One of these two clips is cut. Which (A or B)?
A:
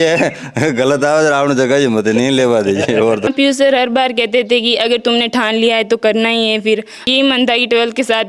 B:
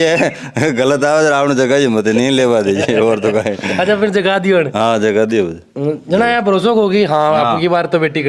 A